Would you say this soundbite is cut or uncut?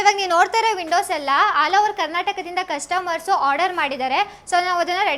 uncut